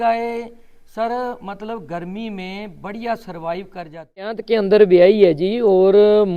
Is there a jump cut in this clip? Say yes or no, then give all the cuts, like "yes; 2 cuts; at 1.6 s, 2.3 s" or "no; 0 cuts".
yes; 1 cut; at 4.4 s